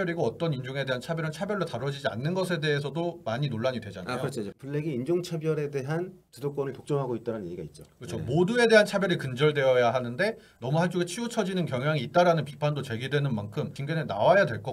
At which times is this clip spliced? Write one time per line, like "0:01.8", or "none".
0:13.8